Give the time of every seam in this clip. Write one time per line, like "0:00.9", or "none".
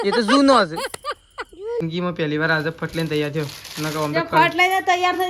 0:01.8